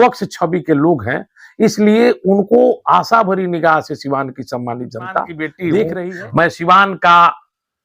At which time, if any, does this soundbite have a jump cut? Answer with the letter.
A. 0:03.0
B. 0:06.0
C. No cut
B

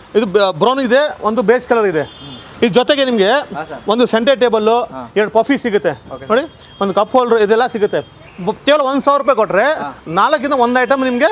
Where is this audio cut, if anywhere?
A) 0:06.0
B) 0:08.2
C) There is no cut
B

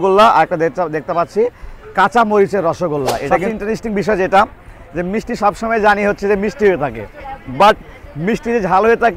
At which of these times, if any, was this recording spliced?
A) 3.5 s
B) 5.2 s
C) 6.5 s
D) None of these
A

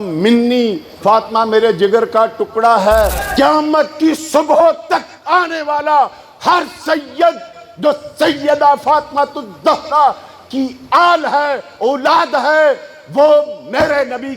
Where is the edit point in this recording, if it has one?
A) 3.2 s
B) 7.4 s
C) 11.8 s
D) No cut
A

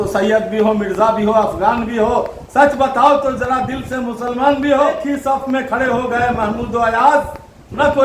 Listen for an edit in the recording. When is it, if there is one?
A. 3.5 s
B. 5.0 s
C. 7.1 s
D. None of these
B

